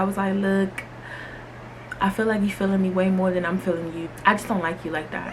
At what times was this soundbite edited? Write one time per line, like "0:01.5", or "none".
0:04.1